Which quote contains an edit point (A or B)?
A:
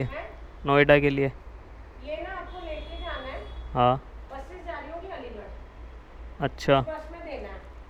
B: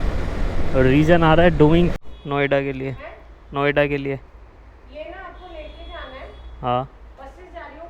B